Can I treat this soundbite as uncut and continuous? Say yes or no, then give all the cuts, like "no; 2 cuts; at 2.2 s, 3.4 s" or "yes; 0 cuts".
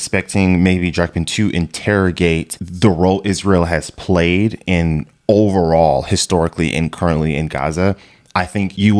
yes; 0 cuts